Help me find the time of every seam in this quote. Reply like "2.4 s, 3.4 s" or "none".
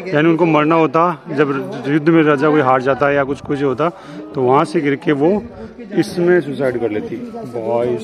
none